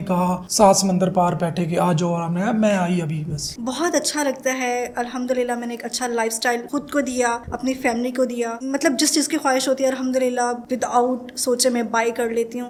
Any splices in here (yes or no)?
no